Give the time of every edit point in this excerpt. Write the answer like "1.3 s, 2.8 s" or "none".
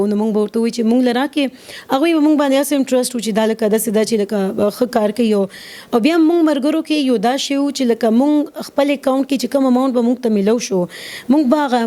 none